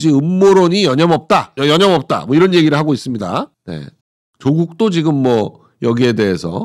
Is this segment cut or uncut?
uncut